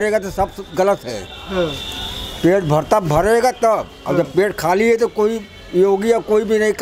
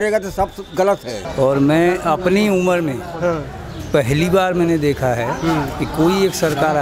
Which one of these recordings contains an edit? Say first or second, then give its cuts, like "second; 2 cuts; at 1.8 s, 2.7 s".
second; 1 cut; at 1.2 s